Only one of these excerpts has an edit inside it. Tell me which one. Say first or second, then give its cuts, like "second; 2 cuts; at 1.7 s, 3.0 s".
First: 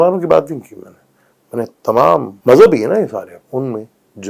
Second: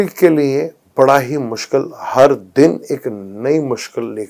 first; 2 cuts; at 2.3 s, 3.4 s